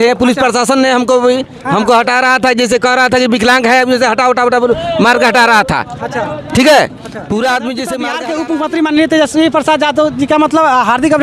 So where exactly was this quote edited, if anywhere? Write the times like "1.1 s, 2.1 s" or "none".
1.5 s, 8.2 s